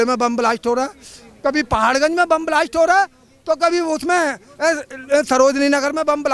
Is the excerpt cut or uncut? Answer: uncut